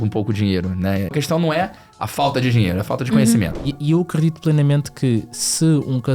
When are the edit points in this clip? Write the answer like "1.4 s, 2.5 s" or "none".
1.1 s, 3.5 s